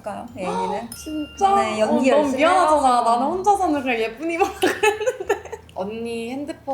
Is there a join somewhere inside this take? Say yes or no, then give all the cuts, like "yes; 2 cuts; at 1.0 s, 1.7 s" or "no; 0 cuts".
yes; 2 cuts; at 1.0 s, 5.5 s